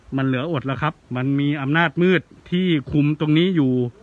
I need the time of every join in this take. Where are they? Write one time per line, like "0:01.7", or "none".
0:01.0
0:02.4